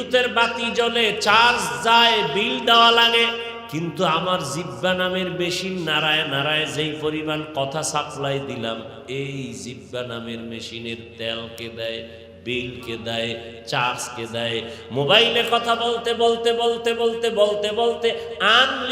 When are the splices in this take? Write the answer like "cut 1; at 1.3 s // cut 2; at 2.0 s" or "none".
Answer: cut 1; at 3.6 s